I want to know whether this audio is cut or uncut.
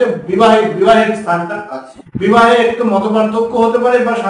uncut